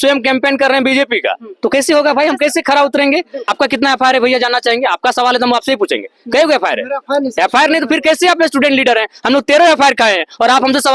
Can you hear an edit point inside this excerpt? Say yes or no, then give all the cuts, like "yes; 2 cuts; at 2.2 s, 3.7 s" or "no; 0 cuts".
yes; 1 cut; at 3.4 s